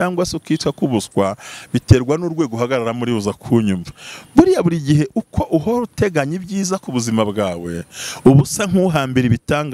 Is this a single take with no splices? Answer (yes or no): yes